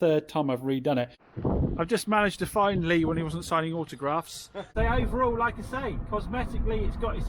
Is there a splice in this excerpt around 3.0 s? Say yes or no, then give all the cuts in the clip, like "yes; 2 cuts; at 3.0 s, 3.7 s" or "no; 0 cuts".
no; 2 cuts; at 1.2 s, 4.7 s